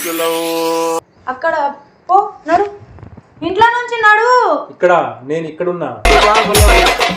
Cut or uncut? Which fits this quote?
cut